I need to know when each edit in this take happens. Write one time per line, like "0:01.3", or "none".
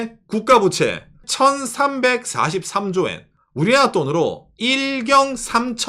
0:01.2
0:03.3